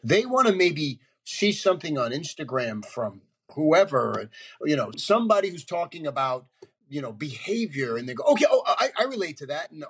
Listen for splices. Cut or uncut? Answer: cut